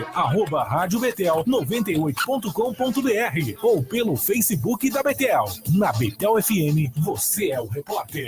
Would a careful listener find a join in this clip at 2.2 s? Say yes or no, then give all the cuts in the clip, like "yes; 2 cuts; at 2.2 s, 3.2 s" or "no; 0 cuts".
yes; 1 cut; at 2.2 s